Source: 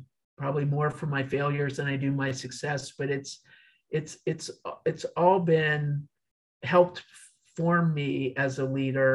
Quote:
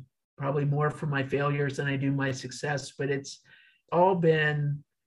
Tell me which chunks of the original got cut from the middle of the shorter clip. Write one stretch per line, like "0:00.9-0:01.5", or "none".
0:03.9-0:05.1